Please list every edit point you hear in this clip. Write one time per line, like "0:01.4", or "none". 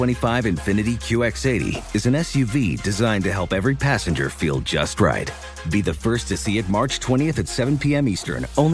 none